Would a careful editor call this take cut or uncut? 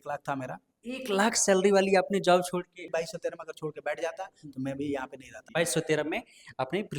cut